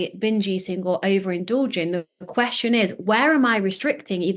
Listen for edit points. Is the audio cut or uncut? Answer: uncut